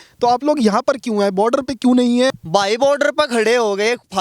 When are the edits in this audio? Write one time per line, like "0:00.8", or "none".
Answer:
0:02.3